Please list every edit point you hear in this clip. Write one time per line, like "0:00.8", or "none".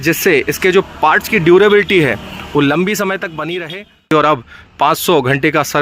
0:04.1

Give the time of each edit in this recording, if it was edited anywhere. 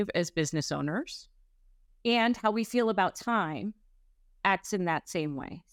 none

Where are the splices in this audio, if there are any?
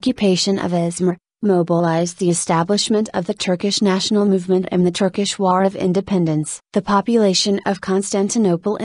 0:06.1

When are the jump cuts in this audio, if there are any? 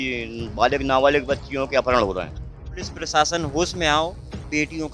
0:03.0

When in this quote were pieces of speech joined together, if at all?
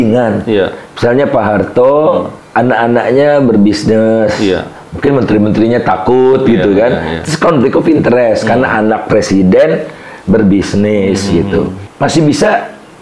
0:02.4
0:11.8

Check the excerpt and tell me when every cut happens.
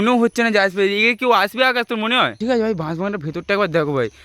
0:02.3

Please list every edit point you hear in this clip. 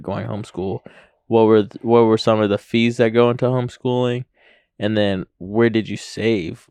none

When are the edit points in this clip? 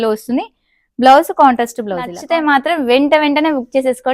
0:02.2

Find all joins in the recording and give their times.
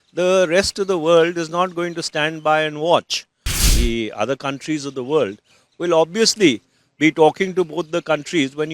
0:03.6

